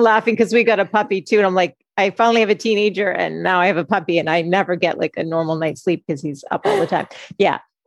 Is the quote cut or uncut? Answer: uncut